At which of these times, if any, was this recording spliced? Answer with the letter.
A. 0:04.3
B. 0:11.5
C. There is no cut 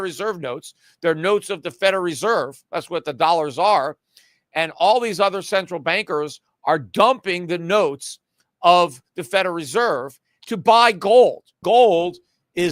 B